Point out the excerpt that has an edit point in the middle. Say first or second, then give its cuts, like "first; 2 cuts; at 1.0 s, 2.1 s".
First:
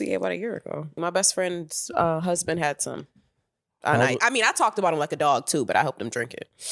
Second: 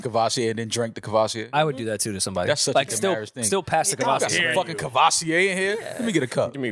first; 1 cut; at 0.9 s